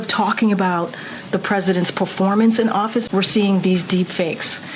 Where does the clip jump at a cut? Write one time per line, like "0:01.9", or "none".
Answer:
0:03.1